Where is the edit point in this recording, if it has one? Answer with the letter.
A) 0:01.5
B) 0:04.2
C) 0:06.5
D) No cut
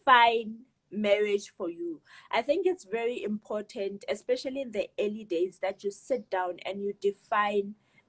D